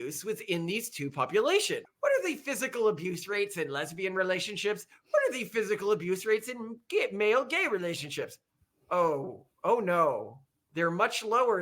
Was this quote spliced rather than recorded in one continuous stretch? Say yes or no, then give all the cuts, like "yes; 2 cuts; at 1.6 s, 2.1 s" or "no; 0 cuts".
yes; 1 cut; at 1.8 s